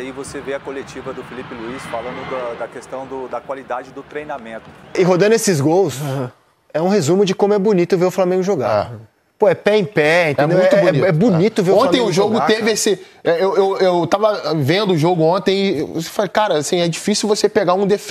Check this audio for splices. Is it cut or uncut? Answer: cut